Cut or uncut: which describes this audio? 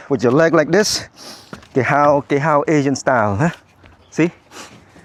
uncut